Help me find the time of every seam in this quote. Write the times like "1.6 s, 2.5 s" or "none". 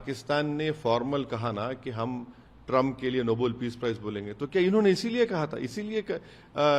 none